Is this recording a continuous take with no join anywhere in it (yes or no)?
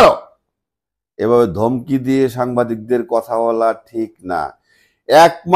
yes